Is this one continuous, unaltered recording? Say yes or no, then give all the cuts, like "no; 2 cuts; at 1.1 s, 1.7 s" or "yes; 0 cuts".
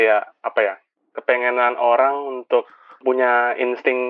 no; 1 cut; at 3.0 s